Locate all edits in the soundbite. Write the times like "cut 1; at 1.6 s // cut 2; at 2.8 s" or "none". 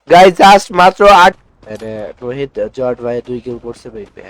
cut 1; at 1.4 s